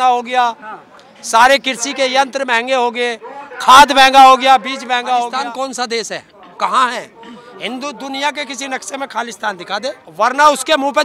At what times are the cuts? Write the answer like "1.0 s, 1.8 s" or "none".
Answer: 5.3 s, 10.1 s